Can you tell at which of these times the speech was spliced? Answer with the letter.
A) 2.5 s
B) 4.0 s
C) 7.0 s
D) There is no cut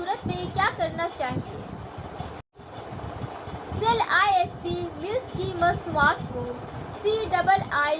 A